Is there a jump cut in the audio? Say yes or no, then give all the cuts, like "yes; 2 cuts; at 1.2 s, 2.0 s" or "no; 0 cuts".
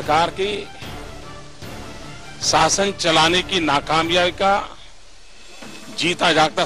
no; 0 cuts